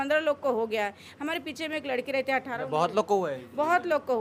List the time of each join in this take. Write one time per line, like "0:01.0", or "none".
none